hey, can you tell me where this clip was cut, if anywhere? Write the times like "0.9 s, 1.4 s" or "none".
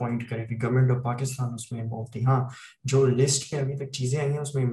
none